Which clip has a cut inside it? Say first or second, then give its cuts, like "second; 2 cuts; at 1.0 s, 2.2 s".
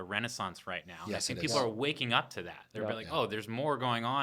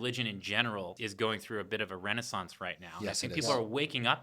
second; 1 cut; at 0.9 s